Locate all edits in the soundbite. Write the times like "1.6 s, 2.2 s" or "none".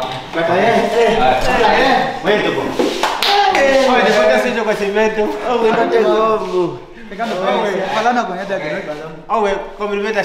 none